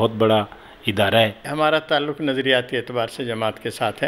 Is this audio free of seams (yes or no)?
no